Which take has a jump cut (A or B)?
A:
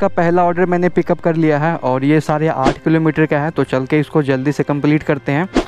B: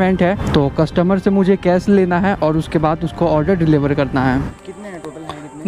B